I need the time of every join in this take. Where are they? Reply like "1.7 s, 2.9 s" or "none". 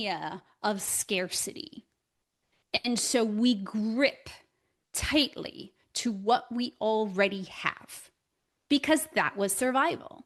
none